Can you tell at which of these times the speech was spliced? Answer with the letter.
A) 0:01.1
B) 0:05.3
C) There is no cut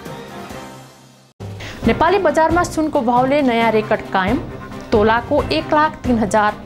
A